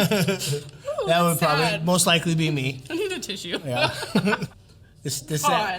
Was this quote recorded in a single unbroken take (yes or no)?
no